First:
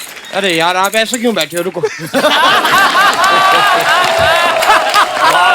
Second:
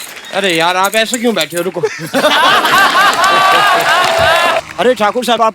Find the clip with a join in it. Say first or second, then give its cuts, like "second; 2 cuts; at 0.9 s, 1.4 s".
second; 1 cut; at 4.6 s